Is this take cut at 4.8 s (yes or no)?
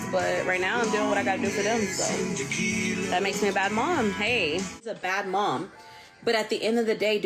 yes